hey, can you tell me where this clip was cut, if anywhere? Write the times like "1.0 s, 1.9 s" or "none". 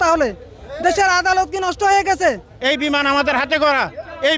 2.5 s